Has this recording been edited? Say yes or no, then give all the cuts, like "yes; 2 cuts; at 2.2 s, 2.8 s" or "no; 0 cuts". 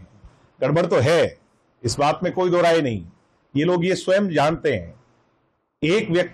no; 0 cuts